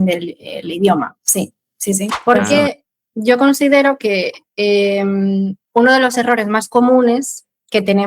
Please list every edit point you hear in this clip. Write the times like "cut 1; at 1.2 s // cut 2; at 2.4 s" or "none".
cut 1; at 2.2 s